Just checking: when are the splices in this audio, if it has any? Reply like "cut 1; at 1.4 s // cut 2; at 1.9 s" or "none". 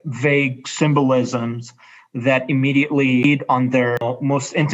cut 1; at 3.2 s // cut 2; at 4.0 s